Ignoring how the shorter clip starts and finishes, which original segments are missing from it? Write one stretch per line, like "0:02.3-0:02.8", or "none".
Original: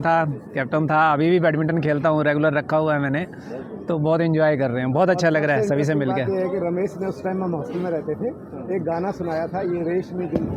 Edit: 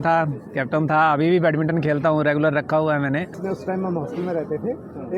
0:03.4-0:07.0